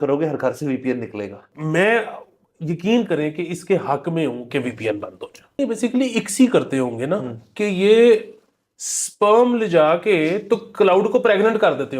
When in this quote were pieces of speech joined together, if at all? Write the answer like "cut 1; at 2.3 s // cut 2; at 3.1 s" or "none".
cut 1; at 1.4 s // cut 2; at 5.6 s